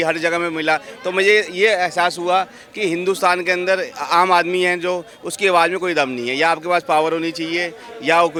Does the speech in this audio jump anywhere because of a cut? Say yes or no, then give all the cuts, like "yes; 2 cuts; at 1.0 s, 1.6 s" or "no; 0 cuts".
no; 0 cuts